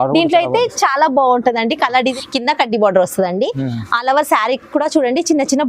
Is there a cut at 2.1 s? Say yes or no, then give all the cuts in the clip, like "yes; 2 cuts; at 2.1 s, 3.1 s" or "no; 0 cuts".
yes; 1 cut; at 2.1 s